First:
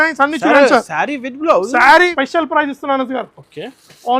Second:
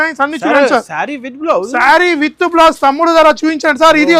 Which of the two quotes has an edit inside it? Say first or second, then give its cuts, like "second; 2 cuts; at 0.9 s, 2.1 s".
first; 1 cut; at 2.1 s